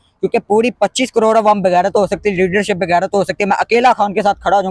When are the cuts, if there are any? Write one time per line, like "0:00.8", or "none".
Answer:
none